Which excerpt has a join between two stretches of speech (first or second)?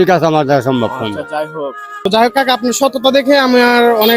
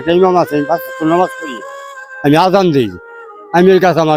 first